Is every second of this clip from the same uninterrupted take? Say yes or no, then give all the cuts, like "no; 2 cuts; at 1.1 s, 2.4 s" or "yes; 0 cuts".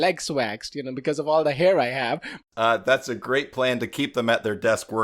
no; 1 cut; at 2.5 s